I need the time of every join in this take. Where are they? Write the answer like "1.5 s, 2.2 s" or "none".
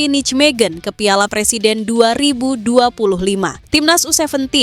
3.6 s